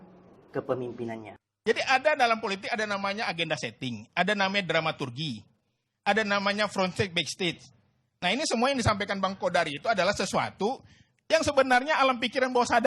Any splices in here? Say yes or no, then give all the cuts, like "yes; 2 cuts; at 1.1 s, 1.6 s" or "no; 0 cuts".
yes; 1 cut; at 1.3 s